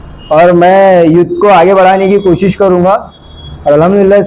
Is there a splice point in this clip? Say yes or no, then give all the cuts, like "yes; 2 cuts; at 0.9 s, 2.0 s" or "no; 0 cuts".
no; 0 cuts